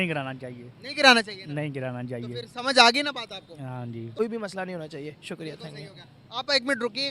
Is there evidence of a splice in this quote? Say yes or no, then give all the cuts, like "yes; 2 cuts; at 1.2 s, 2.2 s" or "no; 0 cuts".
yes; 1 cut; at 4.2 s